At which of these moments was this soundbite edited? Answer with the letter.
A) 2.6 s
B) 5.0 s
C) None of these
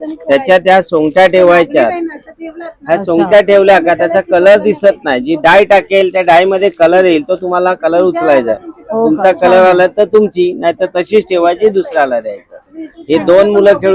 C